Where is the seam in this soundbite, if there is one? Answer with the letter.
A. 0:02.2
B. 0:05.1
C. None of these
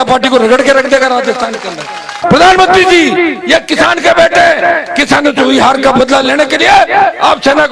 A